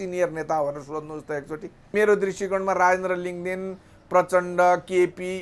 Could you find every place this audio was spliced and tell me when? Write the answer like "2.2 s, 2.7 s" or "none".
1.9 s